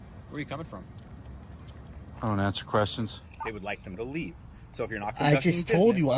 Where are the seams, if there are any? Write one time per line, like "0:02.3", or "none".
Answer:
0:03.3